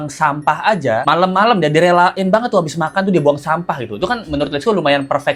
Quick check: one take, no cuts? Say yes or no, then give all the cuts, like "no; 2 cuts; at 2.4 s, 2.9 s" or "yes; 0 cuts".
no; 1 cut; at 1.0 s